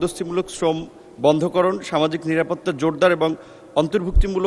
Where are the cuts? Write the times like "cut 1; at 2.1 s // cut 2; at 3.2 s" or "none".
none